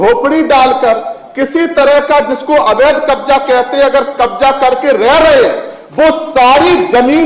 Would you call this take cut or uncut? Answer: uncut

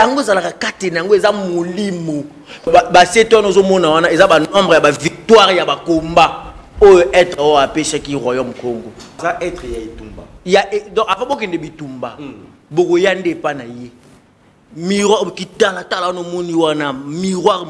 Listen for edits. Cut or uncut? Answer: cut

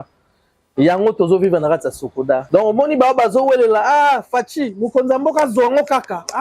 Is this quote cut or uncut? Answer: cut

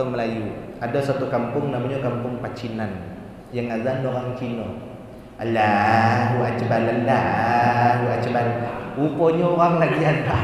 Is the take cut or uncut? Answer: cut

